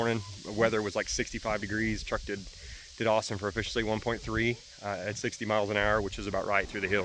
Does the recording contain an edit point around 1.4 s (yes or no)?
no